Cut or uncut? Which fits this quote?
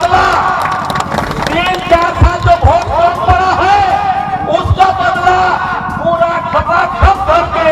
uncut